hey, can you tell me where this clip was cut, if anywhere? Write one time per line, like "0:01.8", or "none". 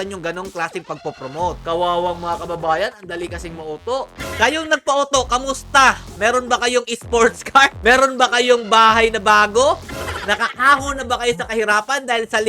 0:01.6
0:04.2
0:09.8